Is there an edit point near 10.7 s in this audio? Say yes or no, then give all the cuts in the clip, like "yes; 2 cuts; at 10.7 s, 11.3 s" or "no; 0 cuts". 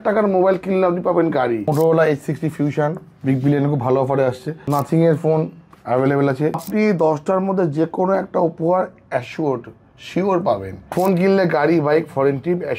yes; 4 cuts; at 1.7 s, 4.5 s, 6.6 s, 10.7 s